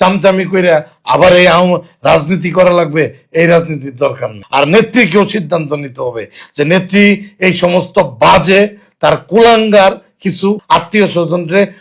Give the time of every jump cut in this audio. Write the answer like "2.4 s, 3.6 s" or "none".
4.3 s, 10.6 s